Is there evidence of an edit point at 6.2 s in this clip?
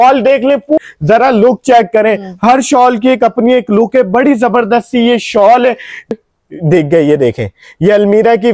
yes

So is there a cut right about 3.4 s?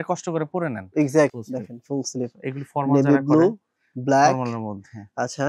no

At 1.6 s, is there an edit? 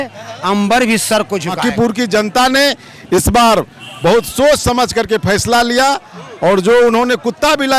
yes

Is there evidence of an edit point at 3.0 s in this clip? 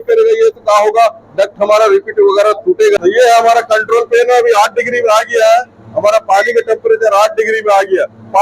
yes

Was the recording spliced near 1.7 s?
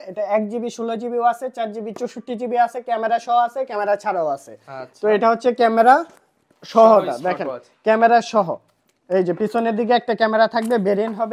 no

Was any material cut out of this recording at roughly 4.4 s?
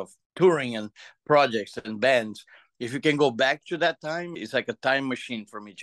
yes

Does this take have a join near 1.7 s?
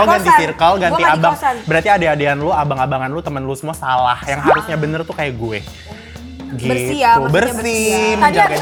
no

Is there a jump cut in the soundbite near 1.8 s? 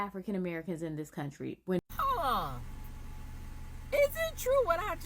yes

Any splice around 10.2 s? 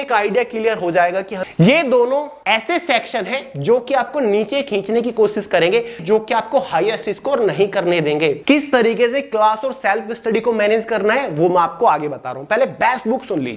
no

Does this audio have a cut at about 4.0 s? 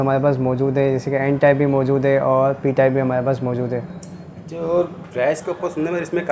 no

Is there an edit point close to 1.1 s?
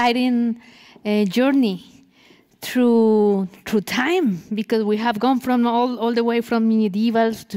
no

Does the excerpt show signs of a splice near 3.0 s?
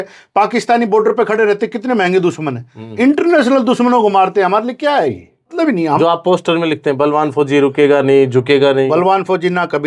no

